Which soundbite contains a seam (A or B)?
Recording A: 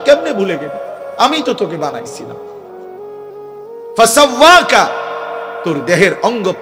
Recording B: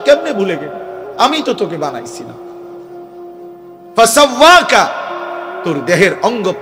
A